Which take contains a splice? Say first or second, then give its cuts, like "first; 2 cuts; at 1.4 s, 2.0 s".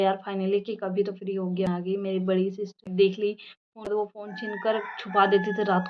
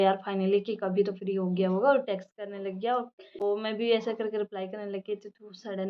first; 3 cuts; at 1.7 s, 2.9 s, 4.1 s